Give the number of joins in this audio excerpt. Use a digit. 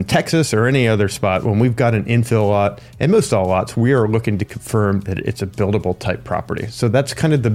0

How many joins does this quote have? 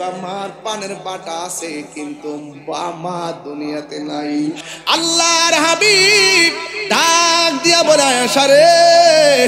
1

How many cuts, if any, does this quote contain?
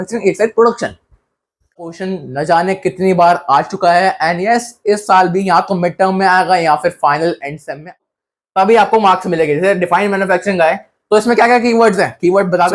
2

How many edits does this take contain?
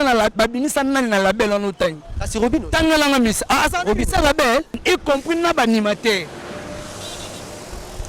1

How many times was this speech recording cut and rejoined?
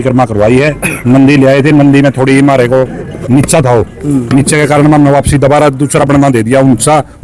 0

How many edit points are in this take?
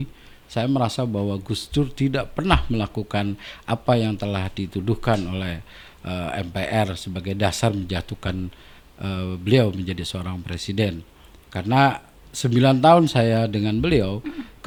0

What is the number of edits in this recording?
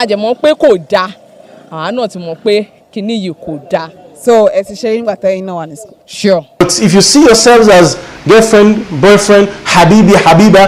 1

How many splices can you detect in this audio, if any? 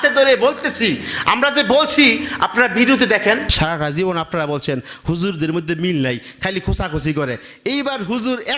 0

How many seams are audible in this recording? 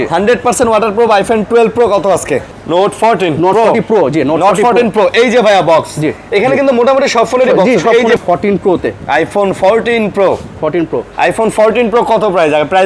2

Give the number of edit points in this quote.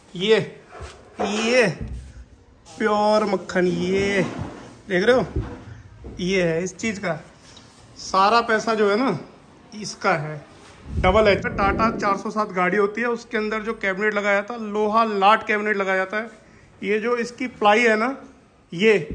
1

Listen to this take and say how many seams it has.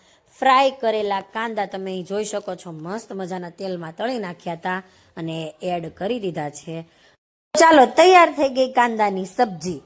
0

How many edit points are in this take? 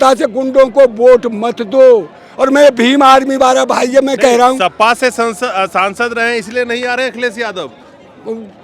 0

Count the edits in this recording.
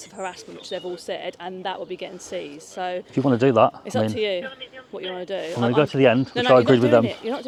0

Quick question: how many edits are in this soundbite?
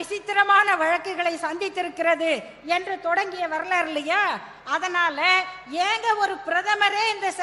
0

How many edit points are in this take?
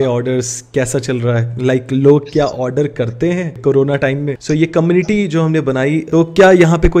3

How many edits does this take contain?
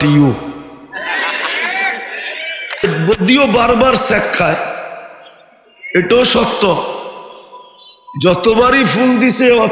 1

